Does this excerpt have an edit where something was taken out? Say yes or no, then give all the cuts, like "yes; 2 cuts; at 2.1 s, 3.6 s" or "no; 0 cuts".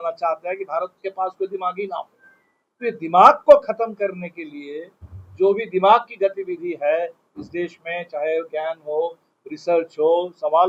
no; 0 cuts